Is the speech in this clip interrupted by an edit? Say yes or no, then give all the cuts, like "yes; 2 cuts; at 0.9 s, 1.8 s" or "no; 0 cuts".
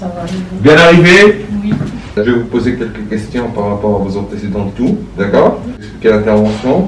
yes; 2 cuts; at 2.1 s, 5.9 s